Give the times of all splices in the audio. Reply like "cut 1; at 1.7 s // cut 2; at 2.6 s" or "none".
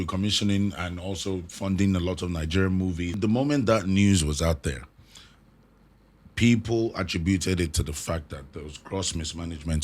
cut 1; at 3.2 s